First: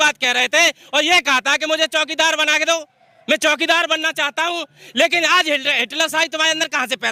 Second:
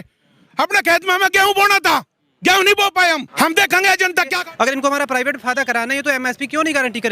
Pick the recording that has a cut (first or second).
second